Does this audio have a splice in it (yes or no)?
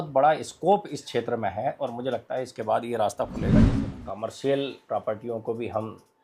yes